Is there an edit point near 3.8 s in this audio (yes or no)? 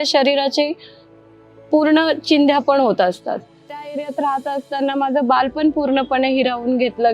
yes